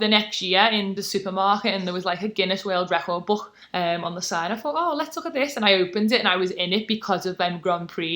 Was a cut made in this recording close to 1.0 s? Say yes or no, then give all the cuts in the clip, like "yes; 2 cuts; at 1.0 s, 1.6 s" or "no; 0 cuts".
yes; 2 cuts; at 1.0 s, 3.6 s